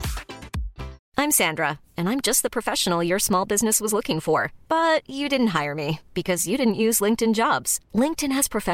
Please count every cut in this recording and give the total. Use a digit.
1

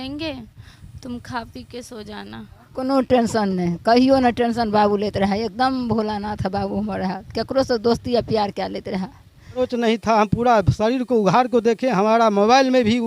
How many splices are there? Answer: 2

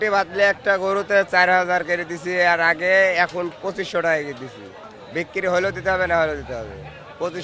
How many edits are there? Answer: 0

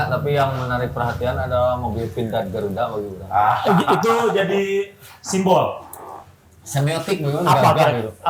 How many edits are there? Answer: 0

